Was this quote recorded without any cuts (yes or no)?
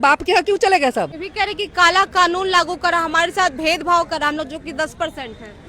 no